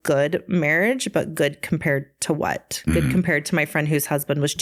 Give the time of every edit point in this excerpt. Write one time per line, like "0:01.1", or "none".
none